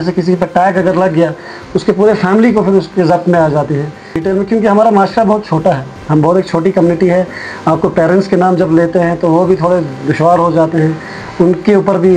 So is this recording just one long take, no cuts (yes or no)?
no